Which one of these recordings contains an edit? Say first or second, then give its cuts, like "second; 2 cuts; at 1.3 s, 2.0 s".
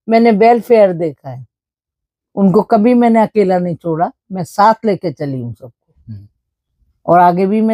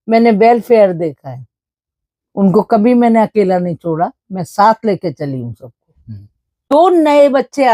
second; 1 cut; at 6.6 s